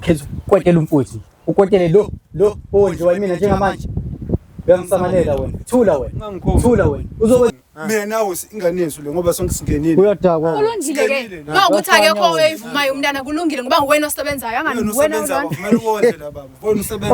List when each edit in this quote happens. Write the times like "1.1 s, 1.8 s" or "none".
7.5 s